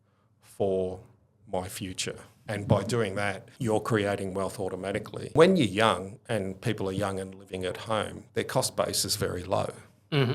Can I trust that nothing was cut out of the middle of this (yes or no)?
no